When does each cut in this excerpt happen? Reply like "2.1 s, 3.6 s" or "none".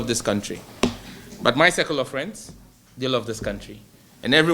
none